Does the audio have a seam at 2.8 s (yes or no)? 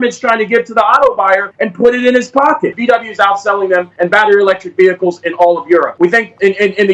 yes